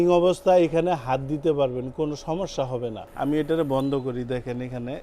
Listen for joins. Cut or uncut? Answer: cut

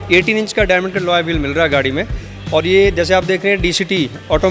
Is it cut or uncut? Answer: uncut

